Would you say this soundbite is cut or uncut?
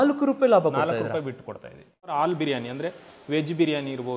cut